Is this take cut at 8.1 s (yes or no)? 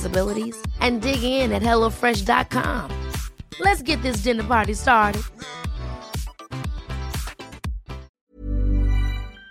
yes